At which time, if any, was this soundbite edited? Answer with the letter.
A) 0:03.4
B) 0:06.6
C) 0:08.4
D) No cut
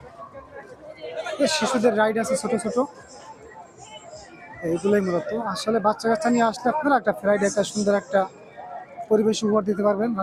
D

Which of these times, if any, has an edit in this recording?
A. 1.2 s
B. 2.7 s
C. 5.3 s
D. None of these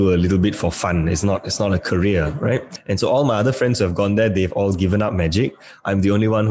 B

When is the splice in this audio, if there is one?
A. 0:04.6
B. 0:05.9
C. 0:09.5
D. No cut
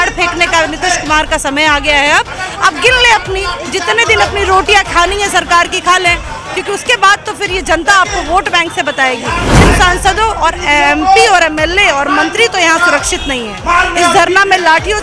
C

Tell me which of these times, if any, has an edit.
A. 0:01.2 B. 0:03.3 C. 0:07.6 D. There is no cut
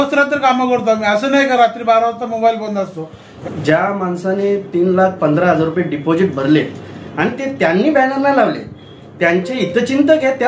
B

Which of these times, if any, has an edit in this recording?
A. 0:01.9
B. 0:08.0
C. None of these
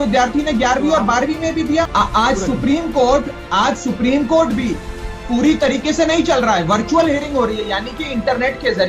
A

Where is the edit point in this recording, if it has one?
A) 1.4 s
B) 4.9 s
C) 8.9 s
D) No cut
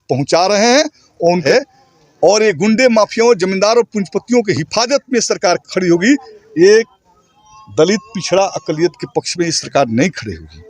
A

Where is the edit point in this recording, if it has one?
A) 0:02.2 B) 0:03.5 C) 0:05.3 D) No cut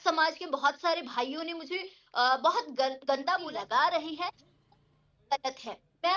B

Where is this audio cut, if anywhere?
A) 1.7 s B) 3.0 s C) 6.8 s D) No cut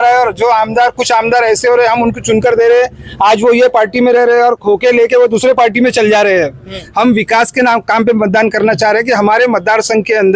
C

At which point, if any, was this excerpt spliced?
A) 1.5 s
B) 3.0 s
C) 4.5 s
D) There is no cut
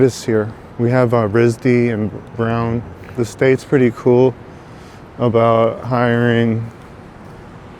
B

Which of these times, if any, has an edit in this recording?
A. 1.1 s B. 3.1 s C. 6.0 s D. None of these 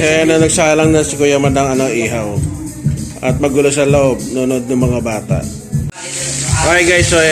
C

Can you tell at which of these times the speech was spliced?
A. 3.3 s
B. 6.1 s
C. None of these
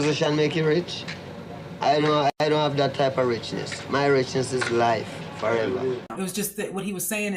B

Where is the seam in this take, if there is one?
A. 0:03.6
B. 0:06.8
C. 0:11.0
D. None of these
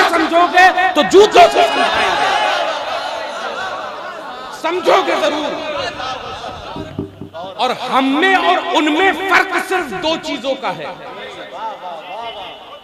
B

